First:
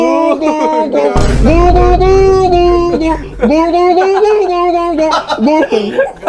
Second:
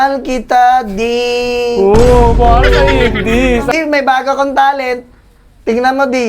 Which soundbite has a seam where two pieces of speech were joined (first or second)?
second